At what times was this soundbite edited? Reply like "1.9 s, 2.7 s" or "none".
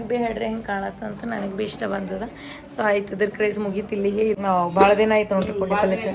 4.4 s